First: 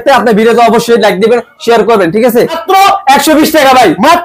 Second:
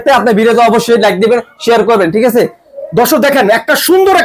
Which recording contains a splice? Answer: first; 1 cut; at 2.6 s

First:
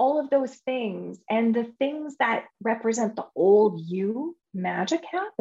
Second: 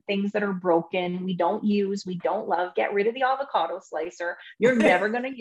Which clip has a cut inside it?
first; 1 cut; at 4.4 s

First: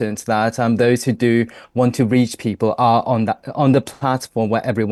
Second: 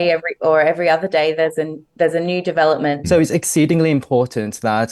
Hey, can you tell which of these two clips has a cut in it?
second; 1 cut; at 3.0 s

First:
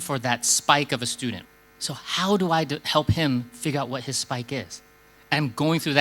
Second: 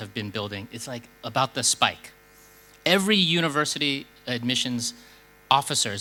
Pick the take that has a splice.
first; 1 cut; at 1.4 s

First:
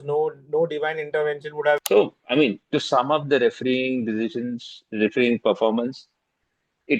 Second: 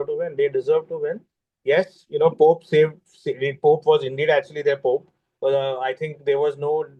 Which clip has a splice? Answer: first; 1 cut; at 1.8 s

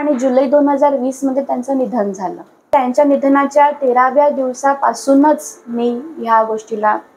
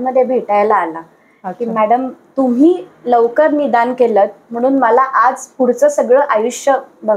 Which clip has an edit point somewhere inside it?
first; 1 cut; at 2.7 s

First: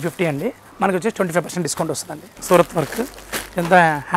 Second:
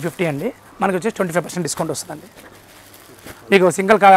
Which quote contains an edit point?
first; 1 cut; at 2.3 s

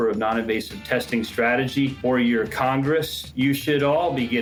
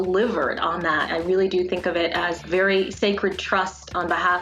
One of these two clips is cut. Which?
second; 1 cut; at 1.1 s

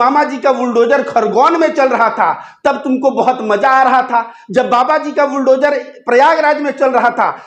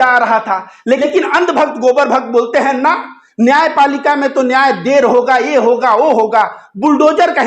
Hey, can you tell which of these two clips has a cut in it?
second; 1 cut; at 1.0 s

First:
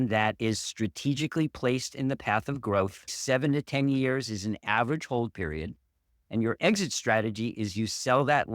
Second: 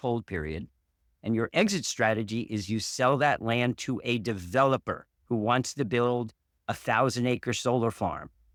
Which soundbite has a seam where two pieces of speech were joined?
first; 1 cut; at 3.1 s

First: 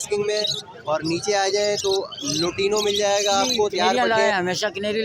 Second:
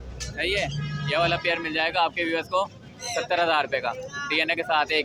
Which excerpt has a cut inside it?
first; 1 cut; at 3.9 s

